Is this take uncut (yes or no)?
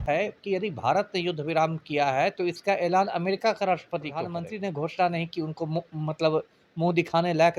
no